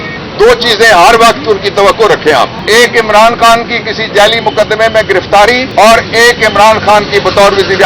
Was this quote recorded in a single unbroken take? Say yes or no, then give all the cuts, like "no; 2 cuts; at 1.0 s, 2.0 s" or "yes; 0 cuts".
no; 2 cuts; at 2.6 s, 5.6 s